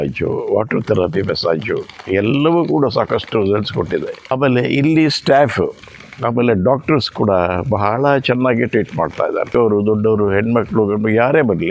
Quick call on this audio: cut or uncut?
cut